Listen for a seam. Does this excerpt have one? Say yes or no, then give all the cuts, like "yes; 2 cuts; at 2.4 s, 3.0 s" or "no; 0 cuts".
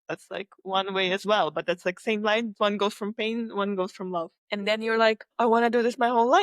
yes; 3 cuts; at 2.5 s, 4.4 s, 5.3 s